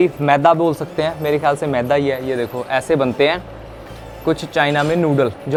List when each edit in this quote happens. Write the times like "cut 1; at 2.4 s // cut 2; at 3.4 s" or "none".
none